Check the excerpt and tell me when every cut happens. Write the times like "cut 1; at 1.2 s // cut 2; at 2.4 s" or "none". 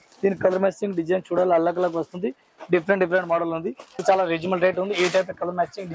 cut 1; at 4.0 s